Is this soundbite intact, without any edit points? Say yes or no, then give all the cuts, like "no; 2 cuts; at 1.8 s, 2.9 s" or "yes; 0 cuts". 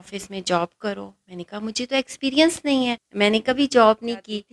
no; 1 cut; at 3.0 s